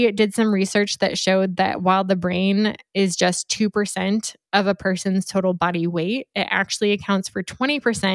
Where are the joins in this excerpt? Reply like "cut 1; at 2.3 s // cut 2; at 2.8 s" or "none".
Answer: none